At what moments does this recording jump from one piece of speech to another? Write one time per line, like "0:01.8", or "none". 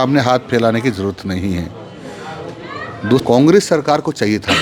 0:03.2